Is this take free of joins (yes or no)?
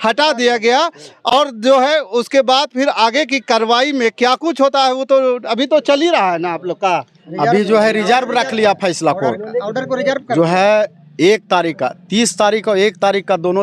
yes